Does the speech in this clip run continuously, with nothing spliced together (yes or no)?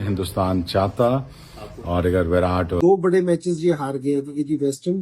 no